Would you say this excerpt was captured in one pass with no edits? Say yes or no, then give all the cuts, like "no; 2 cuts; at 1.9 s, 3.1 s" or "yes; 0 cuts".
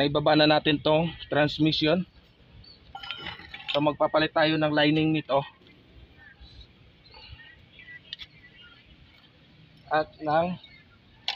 yes; 0 cuts